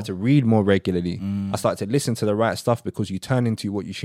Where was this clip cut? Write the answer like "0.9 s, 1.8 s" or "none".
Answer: none